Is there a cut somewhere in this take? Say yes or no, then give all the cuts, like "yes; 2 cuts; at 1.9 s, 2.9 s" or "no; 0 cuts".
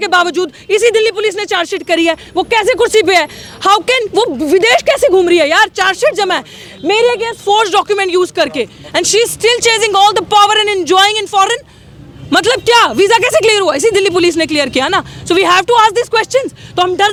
no; 0 cuts